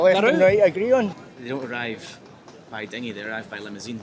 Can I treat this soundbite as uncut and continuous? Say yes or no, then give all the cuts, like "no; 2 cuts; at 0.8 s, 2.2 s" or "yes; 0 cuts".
no; 1 cut; at 1.2 s